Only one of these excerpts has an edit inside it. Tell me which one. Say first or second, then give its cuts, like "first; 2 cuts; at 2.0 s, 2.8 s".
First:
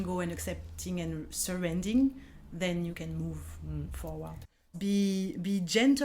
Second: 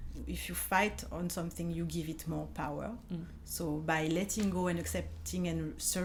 first; 1 cut; at 4.6 s